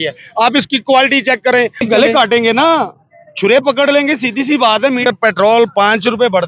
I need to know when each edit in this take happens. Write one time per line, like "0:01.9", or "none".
0:01.8
0:05.0